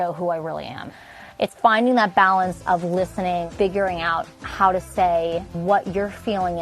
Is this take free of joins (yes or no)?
no